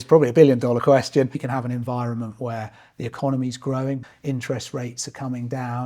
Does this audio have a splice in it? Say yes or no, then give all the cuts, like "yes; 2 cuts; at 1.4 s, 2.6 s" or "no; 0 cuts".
yes; 2 cuts; at 1.5 s, 4.0 s